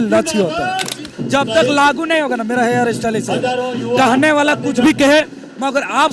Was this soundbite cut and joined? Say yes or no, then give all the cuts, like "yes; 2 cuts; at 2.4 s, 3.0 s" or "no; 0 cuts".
yes; 1 cut; at 1.1 s